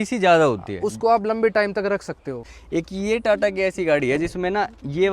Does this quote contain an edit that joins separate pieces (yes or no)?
yes